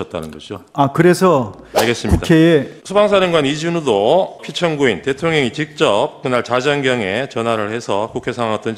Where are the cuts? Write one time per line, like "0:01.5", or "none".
0:02.8
0:04.4